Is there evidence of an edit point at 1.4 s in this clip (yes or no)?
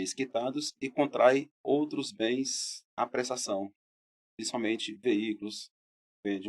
no